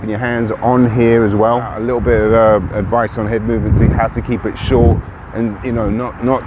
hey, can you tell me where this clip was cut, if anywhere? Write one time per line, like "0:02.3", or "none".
0:01.7